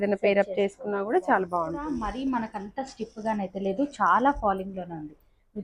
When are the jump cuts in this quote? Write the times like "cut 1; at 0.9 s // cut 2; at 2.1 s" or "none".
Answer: cut 1; at 1.9 s